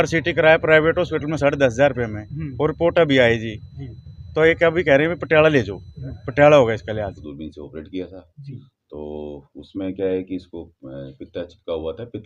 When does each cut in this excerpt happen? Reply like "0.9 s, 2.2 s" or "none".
7.2 s